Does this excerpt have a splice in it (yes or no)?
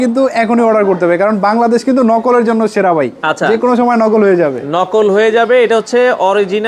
no